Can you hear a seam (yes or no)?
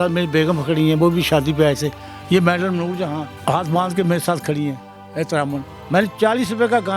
yes